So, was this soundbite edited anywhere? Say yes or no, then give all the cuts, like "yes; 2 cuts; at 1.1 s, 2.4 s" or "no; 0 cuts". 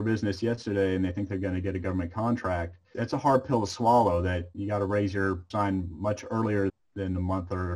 yes; 4 cuts; at 2.9 s, 4.5 s, 5.4 s, 6.7 s